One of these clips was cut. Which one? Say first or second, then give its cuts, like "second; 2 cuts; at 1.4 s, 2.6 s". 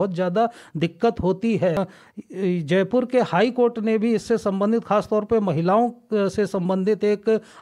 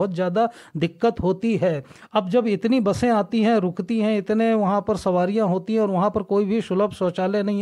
first; 1 cut; at 1.9 s